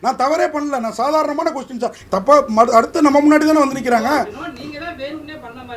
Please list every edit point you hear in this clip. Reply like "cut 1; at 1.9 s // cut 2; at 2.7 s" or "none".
cut 1; at 2.0 s